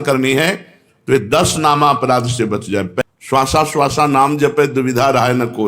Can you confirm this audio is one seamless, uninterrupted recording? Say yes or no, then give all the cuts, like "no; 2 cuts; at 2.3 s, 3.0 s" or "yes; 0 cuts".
no; 1 cut; at 3.1 s